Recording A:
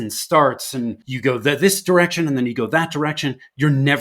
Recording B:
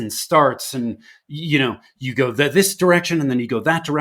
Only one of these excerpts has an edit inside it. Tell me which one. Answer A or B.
A